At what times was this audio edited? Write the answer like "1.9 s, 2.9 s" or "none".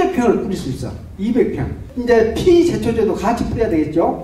1.9 s